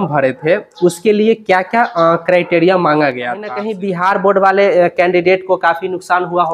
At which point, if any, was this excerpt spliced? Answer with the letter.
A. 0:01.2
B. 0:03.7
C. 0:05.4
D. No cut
B